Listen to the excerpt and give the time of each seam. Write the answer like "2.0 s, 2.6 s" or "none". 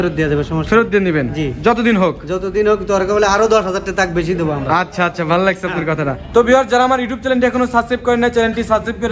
6.3 s